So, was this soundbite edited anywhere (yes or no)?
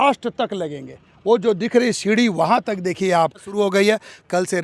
yes